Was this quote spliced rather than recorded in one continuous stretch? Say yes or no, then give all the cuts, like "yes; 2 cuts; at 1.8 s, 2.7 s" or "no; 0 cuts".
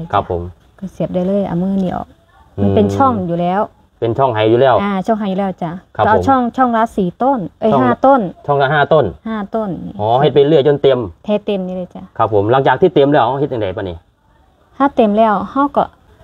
no; 0 cuts